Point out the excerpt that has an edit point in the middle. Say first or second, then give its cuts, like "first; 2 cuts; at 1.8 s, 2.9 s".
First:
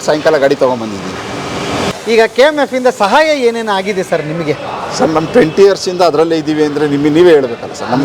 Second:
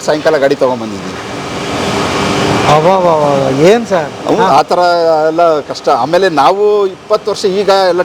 first; 1 cut; at 1.9 s